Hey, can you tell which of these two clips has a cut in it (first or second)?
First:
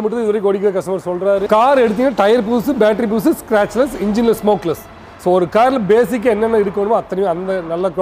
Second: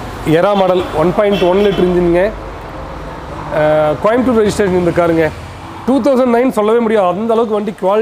first